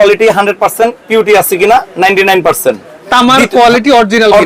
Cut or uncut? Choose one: uncut